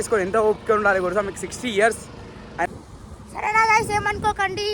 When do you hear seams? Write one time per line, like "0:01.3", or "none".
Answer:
0:02.7